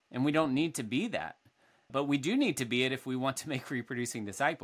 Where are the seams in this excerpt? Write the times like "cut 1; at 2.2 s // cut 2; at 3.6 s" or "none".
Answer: cut 1; at 1.9 s